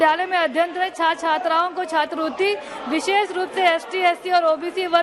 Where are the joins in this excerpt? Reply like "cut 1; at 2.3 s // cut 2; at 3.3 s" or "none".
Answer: none